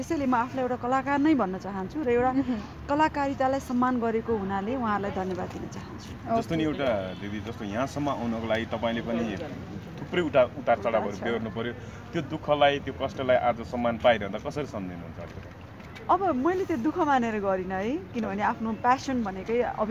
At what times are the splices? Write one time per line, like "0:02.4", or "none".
none